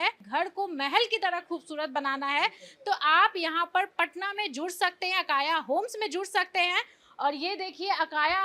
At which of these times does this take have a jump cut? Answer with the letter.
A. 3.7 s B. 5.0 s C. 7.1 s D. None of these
D